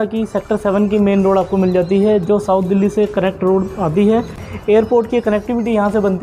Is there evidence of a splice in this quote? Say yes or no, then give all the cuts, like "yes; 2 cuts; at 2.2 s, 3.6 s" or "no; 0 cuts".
yes; 1 cut; at 4.5 s